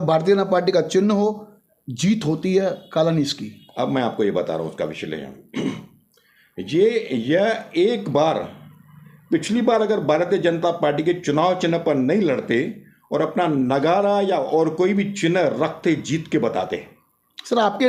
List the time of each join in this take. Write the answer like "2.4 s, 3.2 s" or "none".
none